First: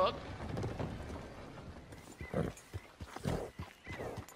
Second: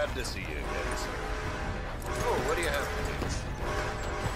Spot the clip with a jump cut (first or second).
first